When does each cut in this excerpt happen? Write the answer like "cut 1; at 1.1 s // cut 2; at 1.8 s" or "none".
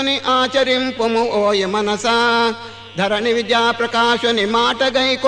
cut 1; at 1.4 s